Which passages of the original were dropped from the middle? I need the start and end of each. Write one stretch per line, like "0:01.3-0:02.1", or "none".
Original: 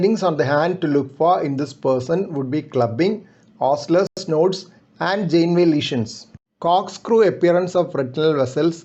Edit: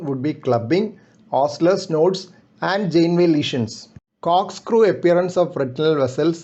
0:04.1-0:04.2